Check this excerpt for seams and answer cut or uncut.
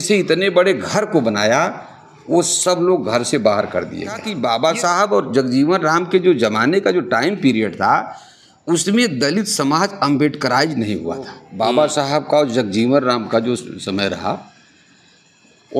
cut